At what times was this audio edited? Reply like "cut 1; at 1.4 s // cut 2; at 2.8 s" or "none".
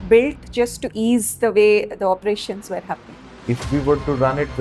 cut 1; at 3.2 s